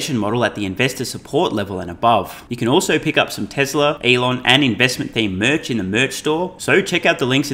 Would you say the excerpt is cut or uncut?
cut